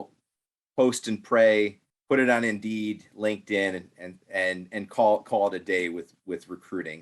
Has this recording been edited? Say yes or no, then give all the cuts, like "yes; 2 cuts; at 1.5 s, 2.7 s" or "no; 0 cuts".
yes; 2 cuts; at 1.9 s, 6.1 s